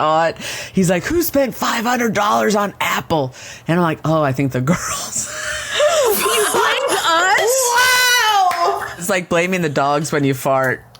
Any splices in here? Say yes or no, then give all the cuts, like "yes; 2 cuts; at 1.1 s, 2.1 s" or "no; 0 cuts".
yes; 1 cut; at 9.0 s